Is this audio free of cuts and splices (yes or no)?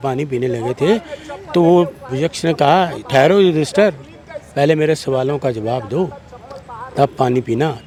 yes